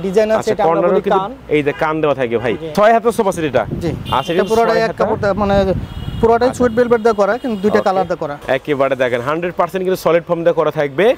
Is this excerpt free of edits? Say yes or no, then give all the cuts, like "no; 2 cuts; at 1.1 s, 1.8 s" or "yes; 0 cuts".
no; 2 cuts; at 2.6 s, 8.3 s